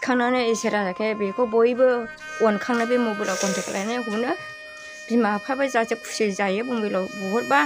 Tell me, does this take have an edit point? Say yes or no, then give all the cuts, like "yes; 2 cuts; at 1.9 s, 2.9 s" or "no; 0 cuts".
no; 0 cuts